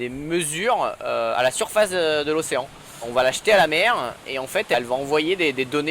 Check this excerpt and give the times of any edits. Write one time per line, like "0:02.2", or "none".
0:03.1
0:04.7